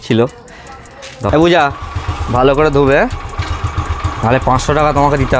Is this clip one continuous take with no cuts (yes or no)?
no